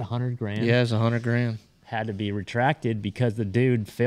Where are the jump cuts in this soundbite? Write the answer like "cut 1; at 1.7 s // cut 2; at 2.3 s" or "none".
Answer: none

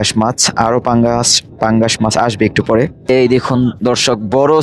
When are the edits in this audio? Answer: cut 1; at 3.1 s

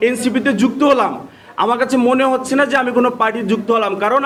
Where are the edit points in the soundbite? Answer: none

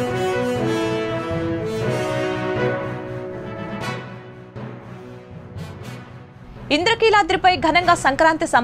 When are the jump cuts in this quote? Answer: cut 1; at 6.3 s

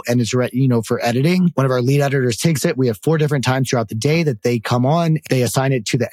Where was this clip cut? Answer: cut 1; at 1.5 s // cut 2; at 4.4 s // cut 3; at 5.2 s

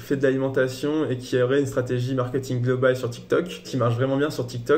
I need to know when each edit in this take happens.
cut 1; at 3.7 s

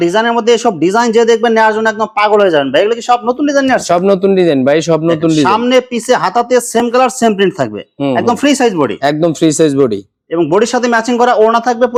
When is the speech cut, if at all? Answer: none

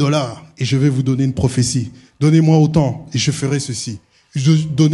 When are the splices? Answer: none

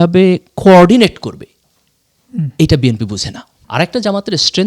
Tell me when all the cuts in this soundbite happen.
cut 1; at 3.4 s

